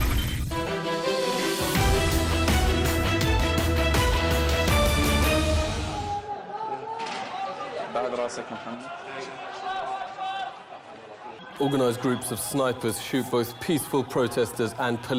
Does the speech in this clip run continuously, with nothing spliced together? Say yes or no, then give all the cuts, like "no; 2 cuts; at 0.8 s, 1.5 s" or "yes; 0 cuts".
yes; 0 cuts